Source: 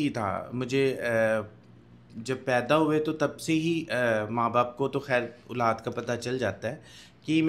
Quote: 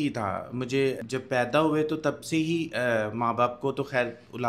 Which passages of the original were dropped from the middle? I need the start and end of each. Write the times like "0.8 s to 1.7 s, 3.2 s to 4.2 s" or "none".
1.0 s to 2.2 s